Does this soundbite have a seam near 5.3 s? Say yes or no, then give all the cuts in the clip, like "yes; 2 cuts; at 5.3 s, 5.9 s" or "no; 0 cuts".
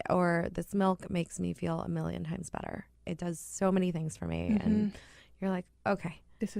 no; 1 cut; at 3.0 s